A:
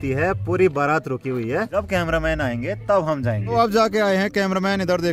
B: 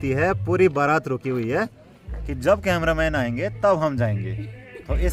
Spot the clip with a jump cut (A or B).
A